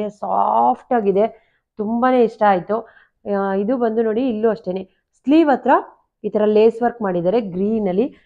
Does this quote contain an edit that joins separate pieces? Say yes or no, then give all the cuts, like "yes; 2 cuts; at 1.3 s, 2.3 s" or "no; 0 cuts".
no; 0 cuts